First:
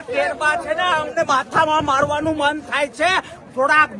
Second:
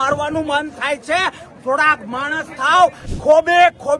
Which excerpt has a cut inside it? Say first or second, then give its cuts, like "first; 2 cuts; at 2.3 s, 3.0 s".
second; 1 cut; at 3.1 s